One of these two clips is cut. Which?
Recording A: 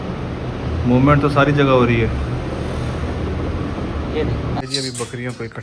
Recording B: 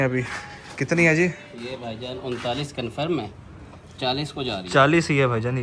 A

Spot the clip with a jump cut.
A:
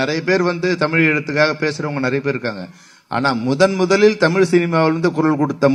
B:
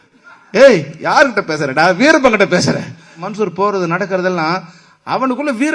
B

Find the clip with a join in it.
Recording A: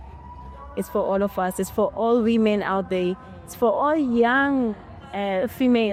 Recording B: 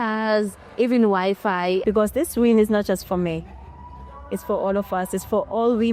B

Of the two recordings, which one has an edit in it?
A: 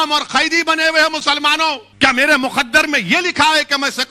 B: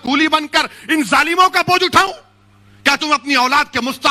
A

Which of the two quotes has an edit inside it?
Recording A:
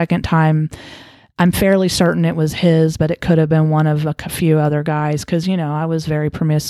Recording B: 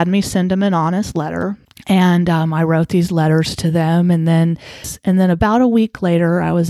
B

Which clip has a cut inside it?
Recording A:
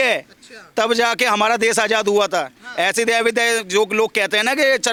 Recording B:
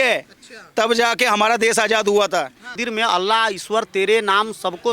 B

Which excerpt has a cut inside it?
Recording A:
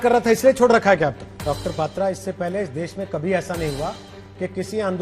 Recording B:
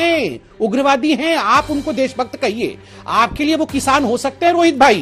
A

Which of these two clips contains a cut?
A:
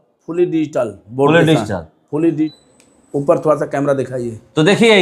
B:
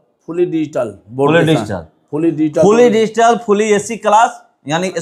A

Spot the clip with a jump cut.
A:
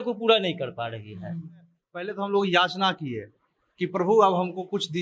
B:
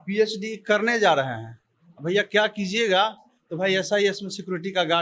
A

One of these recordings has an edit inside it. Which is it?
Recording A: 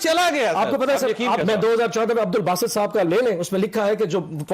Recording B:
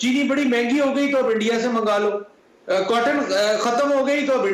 A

